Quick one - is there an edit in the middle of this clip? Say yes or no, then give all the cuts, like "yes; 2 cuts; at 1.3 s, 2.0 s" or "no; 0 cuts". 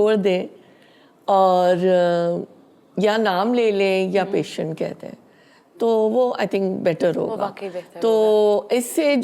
no; 0 cuts